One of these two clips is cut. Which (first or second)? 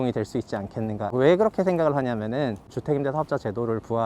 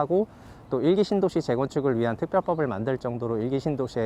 first